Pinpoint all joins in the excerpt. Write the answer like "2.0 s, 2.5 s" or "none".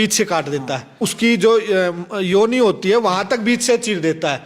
0.9 s